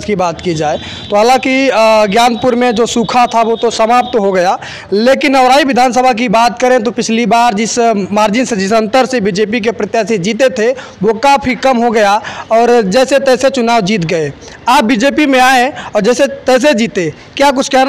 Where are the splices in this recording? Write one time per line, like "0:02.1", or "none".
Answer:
none